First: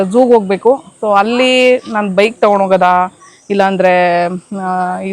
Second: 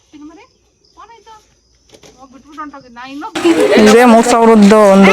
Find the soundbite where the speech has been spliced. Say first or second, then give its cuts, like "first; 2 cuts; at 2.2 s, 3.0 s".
second; 1 cut; at 3.3 s